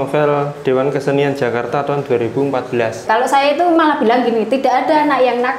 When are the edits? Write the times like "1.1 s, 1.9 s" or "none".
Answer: 3.0 s